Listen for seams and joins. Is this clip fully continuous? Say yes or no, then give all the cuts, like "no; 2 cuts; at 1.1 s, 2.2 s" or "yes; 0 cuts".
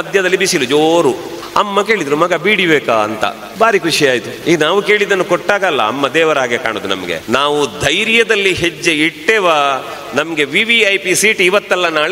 no; 4 cuts; at 1.3 s, 3.4 s, 4.3 s, 7.1 s